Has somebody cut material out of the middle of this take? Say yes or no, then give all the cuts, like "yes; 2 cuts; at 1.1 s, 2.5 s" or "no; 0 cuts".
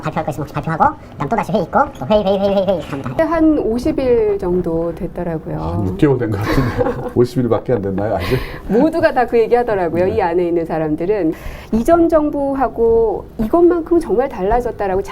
yes; 1 cut; at 7.3 s